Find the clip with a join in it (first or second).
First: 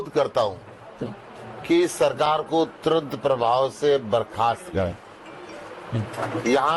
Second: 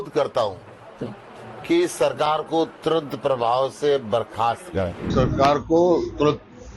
second